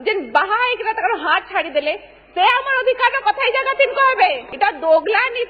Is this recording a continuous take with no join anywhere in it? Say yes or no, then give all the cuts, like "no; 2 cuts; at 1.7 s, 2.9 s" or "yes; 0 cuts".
no; 1 cut; at 4.5 s